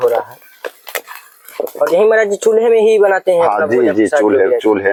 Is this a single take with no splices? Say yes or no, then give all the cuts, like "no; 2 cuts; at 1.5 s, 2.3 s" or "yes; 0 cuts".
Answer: yes; 0 cuts